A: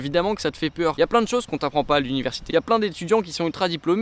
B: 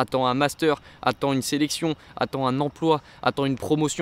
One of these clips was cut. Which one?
A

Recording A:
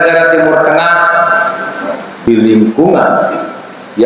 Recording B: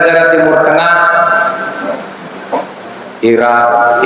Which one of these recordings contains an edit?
A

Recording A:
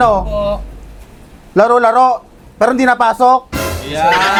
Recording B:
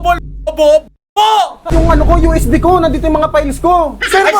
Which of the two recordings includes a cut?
B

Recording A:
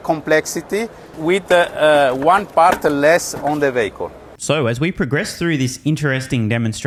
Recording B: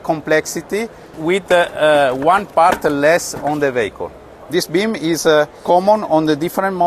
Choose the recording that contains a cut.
B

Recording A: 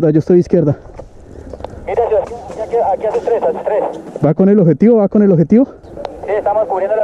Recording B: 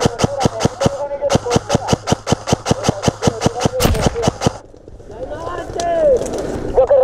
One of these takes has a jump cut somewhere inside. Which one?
A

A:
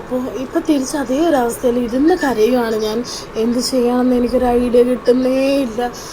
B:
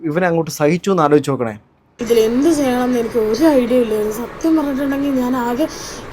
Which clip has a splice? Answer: B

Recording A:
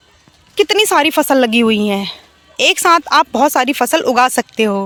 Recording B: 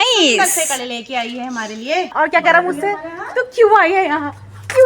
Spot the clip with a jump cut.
B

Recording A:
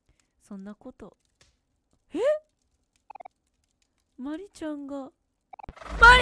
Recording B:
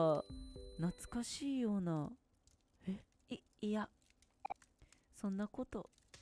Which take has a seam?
B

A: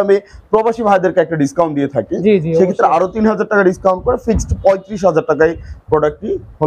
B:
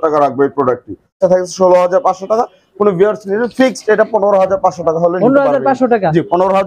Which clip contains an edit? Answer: B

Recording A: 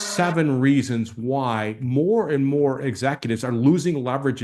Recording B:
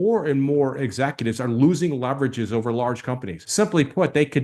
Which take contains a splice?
B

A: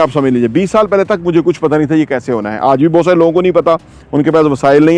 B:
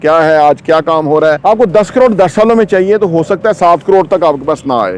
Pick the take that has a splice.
B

